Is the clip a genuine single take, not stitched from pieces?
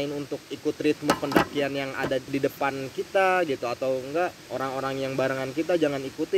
no; 2 cuts; at 2.3 s, 4.4 s

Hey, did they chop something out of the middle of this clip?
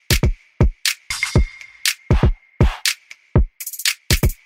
no; 0 cuts

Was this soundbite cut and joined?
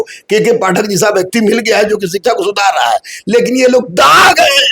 no; 0 cuts

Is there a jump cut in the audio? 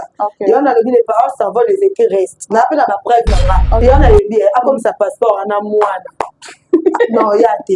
yes; 1 cut; at 3.8 s

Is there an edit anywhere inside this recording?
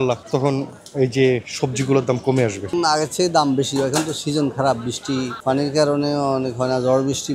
yes; 1 cut; at 2.7 s

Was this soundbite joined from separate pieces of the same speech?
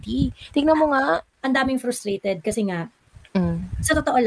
yes; 1 cut; at 1.3 s

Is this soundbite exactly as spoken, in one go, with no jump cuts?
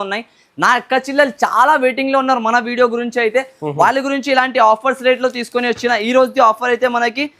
yes; 0 cuts

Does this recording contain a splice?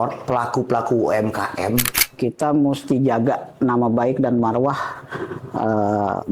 yes; 1 cut; at 1.9 s

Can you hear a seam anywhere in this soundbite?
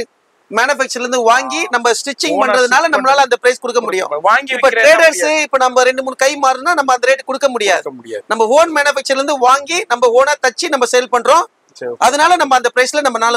no; 0 cuts

